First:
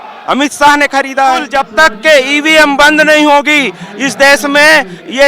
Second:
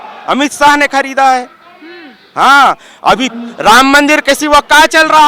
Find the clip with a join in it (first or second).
first